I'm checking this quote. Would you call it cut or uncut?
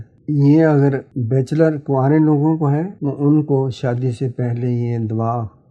cut